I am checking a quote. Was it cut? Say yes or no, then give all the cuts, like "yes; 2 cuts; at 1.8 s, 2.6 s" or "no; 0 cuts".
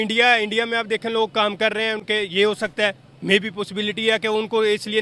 no; 0 cuts